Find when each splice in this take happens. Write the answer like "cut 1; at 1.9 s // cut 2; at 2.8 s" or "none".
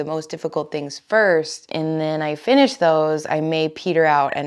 cut 1; at 1.6 s